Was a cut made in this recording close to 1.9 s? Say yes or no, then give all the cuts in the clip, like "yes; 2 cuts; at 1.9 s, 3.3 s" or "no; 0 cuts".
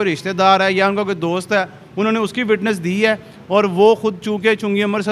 no; 0 cuts